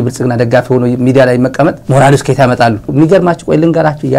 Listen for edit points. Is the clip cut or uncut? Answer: cut